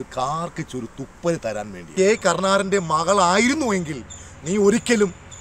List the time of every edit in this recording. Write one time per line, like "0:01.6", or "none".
0:01.8

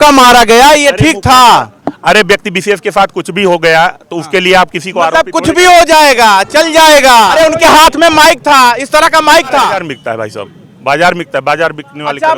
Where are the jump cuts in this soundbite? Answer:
0:07.3
0:09.9

